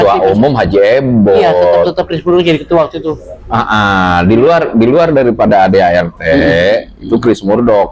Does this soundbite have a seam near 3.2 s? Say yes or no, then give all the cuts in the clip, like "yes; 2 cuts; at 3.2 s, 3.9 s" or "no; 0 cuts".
no; 0 cuts